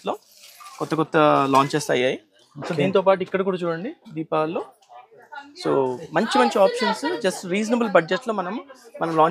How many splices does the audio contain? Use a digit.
0